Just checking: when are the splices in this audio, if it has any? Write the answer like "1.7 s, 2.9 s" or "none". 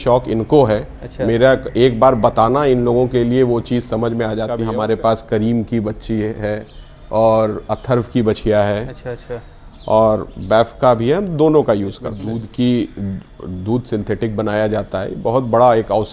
4.6 s, 12.2 s